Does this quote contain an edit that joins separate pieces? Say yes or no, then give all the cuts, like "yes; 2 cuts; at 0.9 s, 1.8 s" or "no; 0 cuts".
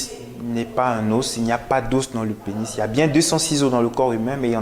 no; 0 cuts